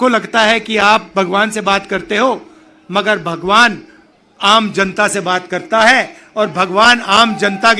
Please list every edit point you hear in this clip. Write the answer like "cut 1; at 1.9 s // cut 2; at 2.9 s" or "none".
none